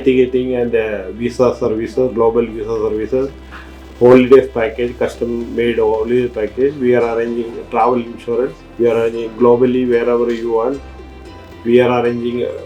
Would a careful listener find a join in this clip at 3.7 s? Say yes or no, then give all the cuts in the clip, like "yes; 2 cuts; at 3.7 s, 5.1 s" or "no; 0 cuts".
no; 0 cuts